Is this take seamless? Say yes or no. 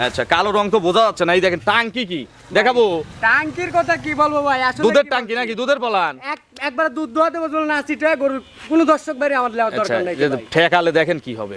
yes